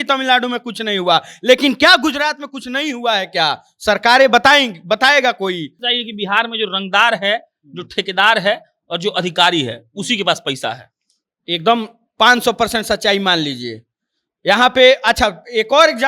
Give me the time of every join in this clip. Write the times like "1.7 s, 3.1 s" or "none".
5.8 s